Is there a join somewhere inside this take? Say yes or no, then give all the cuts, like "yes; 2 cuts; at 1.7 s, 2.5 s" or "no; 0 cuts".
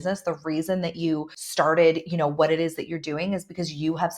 yes; 1 cut; at 1.4 s